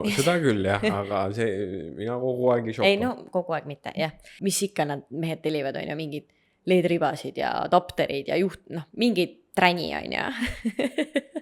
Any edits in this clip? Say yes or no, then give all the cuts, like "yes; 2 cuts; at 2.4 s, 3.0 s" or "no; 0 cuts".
yes; 1 cut; at 4.3 s